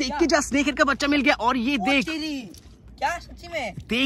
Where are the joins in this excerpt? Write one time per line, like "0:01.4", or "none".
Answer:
none